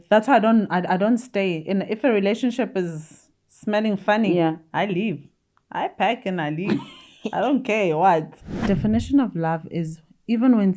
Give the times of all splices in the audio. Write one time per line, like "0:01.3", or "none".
0:08.6